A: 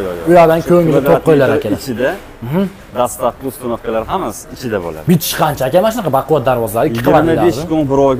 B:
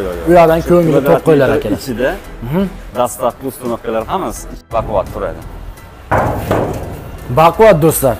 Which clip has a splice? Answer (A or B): B